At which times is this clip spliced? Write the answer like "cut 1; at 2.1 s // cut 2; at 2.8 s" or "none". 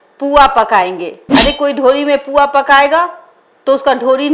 none